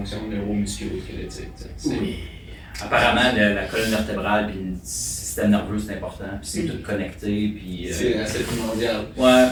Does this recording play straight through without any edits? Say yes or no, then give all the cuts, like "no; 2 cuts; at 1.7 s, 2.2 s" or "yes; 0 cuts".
yes; 0 cuts